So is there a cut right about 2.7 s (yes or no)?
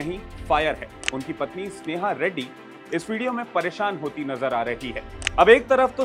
no